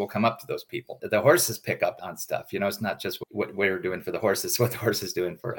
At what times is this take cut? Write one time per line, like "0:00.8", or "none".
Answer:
0:01.0
0:01.9